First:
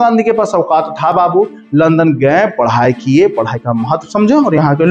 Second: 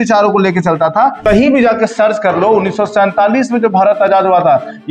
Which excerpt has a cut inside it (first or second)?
second